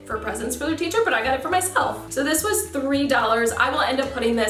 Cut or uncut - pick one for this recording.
uncut